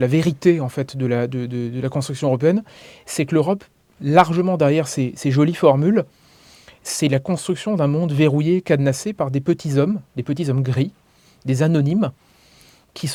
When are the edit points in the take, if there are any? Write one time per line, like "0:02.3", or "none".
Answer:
none